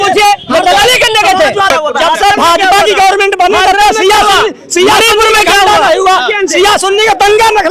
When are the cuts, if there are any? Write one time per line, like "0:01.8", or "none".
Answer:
0:01.7

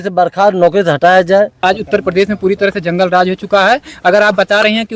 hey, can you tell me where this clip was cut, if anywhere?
0:01.6

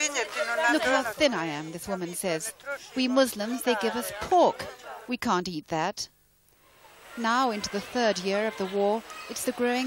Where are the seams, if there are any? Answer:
none

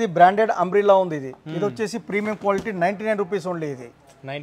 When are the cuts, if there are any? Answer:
none

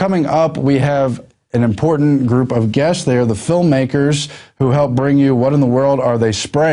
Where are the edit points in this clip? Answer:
none

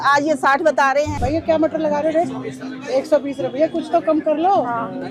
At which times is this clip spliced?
0:01.1

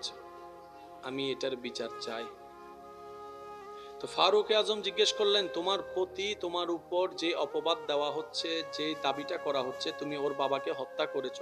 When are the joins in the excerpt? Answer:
0:02.3
0:03.8

